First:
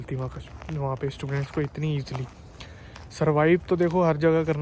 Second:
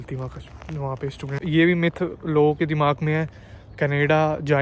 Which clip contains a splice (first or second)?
second